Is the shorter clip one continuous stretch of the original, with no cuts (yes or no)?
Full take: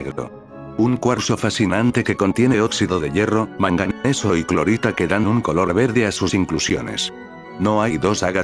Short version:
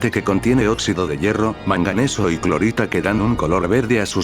no